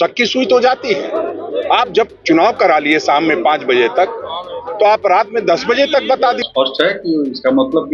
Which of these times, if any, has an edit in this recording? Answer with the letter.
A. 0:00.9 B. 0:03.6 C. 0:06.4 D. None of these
C